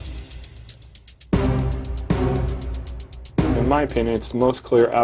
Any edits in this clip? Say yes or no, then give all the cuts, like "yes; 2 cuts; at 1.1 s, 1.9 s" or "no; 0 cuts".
yes; 1 cut; at 3.4 s